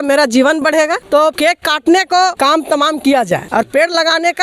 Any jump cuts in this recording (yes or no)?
yes